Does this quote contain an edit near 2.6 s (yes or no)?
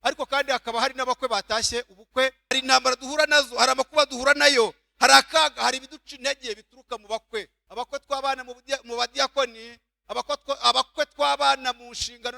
yes